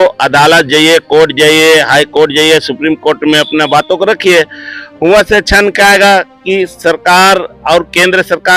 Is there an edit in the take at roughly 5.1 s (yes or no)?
no